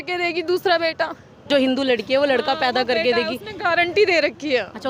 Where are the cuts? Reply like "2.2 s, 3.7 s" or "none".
1.5 s